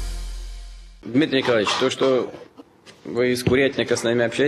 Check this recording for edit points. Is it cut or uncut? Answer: cut